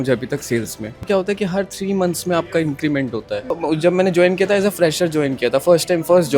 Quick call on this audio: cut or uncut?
cut